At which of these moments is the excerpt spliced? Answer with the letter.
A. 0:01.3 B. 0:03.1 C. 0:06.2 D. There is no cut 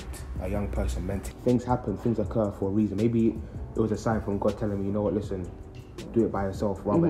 A